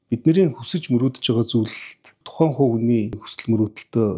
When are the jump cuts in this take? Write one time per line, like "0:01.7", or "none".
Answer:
0:02.2
0:03.3